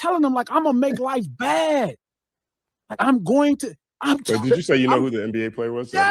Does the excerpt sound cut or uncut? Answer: uncut